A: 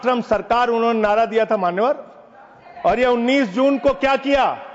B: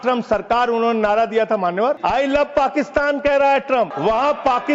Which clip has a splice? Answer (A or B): B